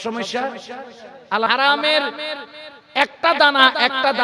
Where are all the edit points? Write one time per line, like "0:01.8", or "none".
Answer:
0:01.5